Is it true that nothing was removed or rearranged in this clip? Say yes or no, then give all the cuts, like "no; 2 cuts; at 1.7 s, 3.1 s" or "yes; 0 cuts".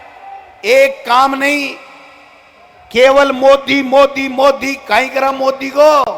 yes; 0 cuts